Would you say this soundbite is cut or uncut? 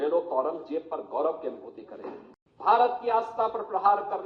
cut